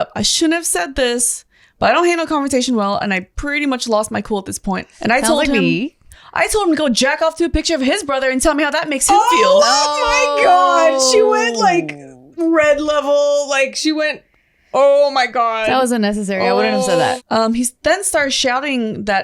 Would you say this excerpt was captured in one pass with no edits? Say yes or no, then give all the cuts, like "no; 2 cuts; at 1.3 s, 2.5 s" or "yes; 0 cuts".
no; 3 cuts; at 4.9 s, 6.2 s, 17.2 s